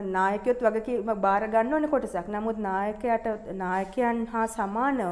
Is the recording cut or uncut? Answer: uncut